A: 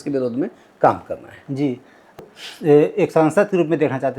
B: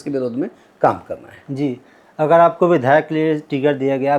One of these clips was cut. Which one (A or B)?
A